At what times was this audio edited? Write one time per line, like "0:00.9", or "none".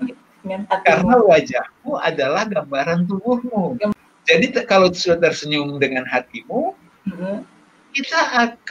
0:03.9